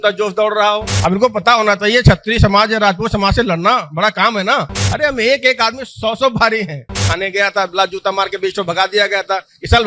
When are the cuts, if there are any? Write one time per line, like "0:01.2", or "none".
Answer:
0:00.9
0:04.8
0:07.0